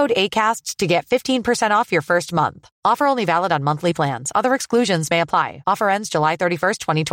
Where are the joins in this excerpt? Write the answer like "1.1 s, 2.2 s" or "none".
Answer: none